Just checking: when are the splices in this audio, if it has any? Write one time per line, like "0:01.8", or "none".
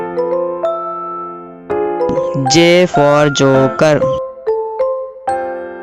0:02.2
0:04.0